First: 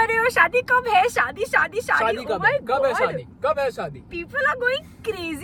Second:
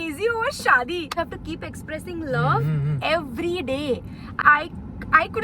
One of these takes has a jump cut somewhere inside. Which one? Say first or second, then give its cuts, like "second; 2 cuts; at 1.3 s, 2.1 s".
second; 2 cuts; at 1.2 s, 4.3 s